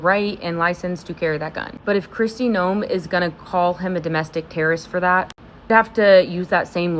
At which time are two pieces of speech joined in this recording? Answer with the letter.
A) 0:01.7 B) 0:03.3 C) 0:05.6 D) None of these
A